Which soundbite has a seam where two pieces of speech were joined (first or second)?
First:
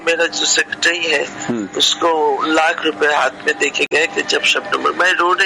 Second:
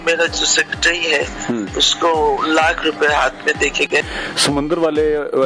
second